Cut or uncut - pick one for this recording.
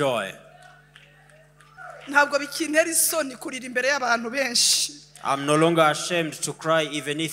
cut